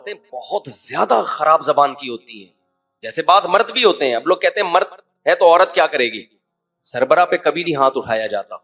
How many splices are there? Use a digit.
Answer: 0